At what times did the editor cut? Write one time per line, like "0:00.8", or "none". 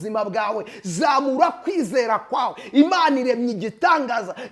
none